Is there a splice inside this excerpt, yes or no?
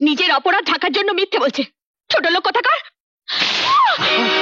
no